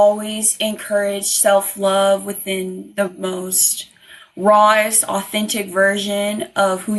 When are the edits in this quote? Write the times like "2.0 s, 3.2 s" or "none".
none